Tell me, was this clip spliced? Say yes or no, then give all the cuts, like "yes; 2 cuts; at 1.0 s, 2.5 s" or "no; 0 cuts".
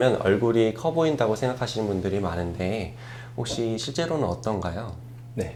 no; 0 cuts